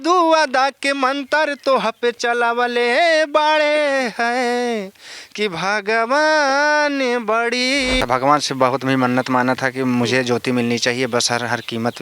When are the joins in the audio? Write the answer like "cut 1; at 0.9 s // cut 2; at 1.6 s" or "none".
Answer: cut 1; at 8.0 s